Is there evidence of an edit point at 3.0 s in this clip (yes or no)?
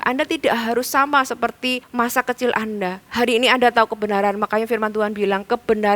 yes